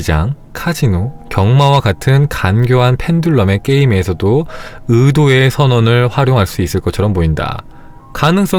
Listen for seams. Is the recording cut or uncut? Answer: uncut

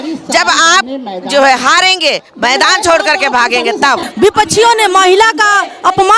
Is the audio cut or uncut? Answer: cut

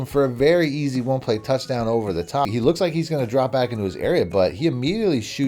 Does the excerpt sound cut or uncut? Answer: cut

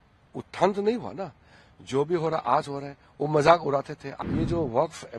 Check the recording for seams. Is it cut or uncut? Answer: cut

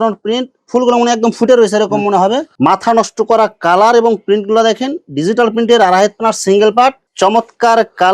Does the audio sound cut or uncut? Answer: cut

